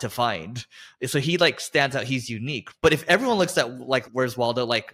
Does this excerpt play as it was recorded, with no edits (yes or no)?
no